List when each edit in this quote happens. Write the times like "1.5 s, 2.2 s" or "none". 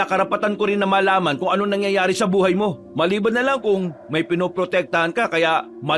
2.8 s